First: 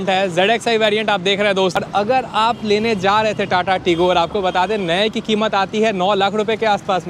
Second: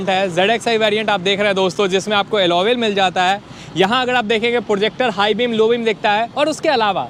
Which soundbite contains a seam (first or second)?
first